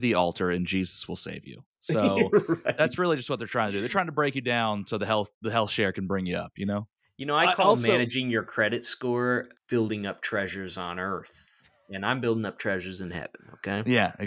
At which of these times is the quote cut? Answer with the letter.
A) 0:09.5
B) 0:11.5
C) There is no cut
A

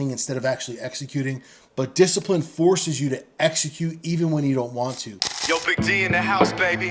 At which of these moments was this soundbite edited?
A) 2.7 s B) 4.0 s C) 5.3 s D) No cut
C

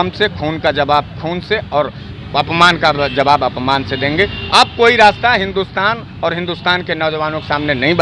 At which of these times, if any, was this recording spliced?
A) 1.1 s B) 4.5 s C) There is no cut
C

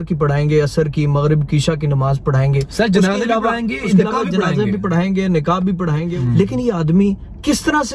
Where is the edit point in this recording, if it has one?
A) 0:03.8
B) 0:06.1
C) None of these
B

